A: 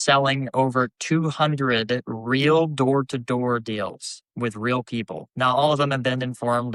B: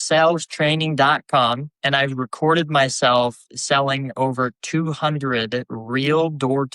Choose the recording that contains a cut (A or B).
B